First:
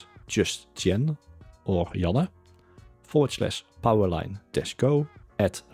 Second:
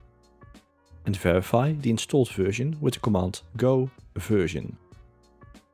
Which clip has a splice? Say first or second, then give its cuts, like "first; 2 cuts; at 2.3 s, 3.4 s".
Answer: second; 3 cuts; at 1.0 s, 3.4 s, 4.8 s